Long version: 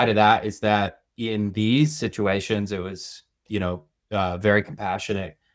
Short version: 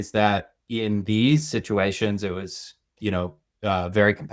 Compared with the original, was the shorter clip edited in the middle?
no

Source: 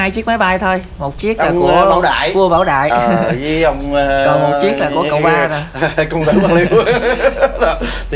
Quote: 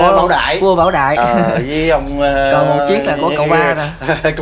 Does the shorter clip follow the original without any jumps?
yes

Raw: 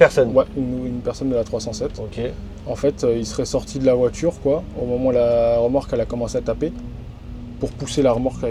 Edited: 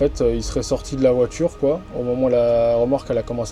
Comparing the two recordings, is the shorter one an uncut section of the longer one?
yes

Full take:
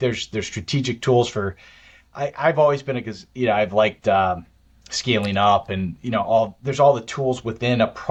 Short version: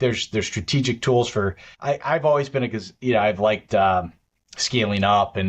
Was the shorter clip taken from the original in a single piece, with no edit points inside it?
no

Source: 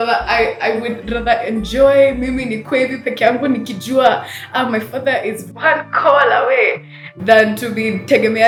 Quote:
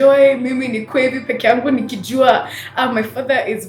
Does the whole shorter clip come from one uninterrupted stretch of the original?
yes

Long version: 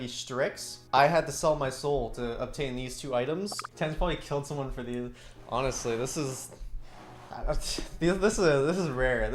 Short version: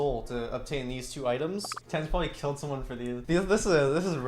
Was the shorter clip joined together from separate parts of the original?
yes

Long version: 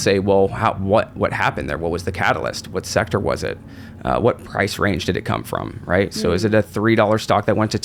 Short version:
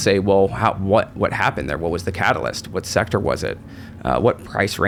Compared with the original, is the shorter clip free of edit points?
yes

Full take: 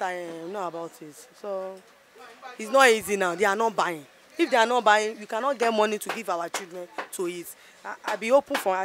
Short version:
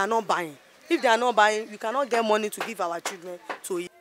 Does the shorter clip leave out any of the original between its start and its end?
no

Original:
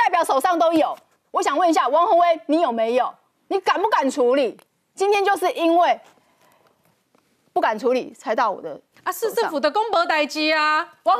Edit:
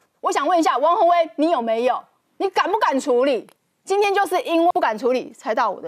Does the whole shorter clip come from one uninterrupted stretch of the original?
no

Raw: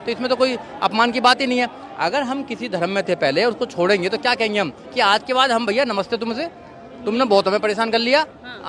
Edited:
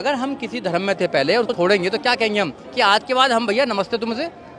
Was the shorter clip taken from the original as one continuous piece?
no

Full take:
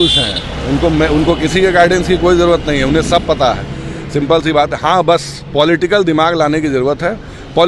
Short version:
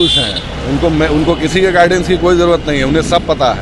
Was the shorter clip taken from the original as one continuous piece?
yes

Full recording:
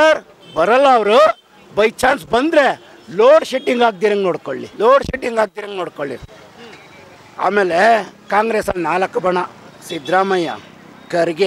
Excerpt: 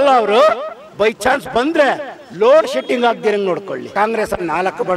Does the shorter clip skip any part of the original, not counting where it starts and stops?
yes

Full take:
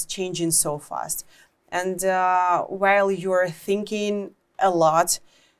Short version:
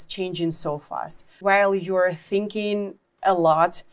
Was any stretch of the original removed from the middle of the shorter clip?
yes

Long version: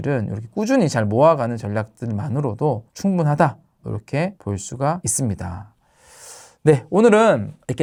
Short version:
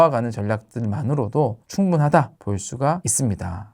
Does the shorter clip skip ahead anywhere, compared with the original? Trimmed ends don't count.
yes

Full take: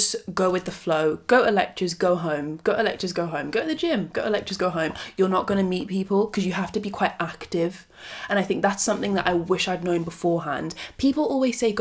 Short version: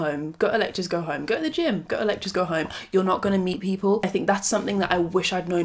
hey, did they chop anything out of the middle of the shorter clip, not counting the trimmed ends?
yes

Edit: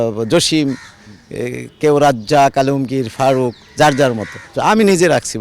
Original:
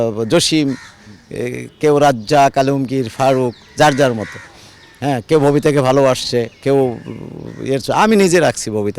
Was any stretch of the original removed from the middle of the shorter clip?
yes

